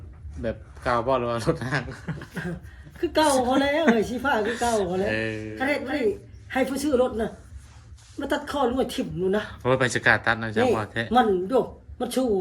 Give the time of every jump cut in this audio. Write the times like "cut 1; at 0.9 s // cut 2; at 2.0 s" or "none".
cut 1; at 5.5 s

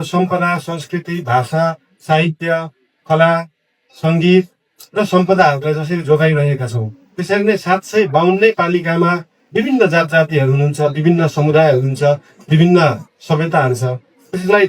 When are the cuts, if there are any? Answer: none

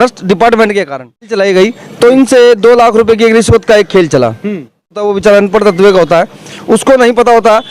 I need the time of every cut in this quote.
cut 1; at 1.3 s // cut 2; at 5.1 s

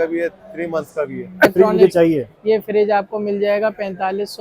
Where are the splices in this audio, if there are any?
cut 1; at 1.5 s

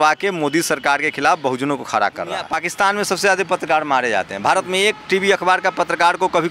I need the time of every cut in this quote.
cut 1; at 2.5 s

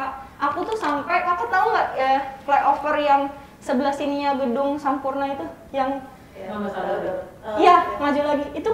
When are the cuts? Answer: none

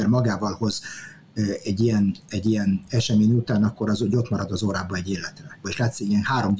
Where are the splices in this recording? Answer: cut 1; at 5.6 s

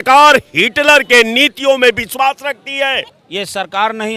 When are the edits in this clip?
cut 1; at 3.1 s

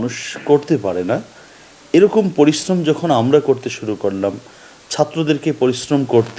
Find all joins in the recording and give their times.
none

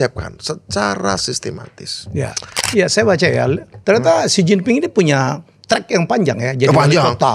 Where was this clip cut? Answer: cut 1; at 2.6 s

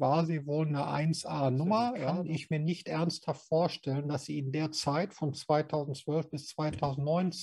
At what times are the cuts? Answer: cut 1; at 2.1 s

